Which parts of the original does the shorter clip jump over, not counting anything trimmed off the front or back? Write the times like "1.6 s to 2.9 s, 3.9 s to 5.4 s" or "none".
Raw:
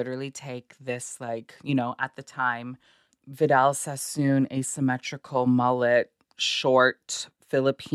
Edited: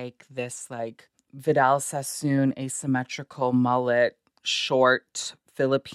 1.5 s to 3.0 s